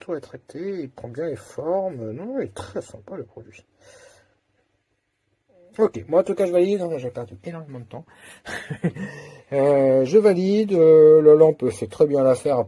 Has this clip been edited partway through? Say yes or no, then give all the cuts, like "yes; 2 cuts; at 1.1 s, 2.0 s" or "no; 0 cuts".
no; 0 cuts